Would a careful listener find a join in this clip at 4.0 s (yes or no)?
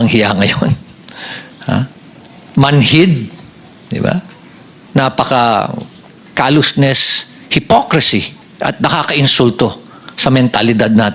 no